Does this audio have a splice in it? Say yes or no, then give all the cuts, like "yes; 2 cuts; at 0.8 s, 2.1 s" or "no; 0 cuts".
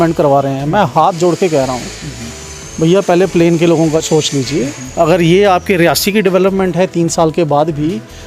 yes; 1 cut; at 4.0 s